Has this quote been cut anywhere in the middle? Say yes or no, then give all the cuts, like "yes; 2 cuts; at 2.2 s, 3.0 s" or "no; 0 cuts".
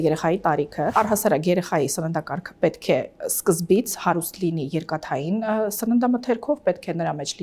yes; 1 cut; at 0.9 s